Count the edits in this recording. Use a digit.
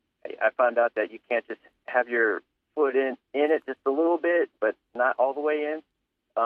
0